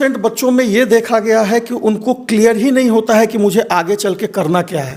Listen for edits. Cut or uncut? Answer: uncut